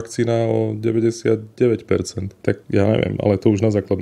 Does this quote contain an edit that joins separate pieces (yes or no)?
yes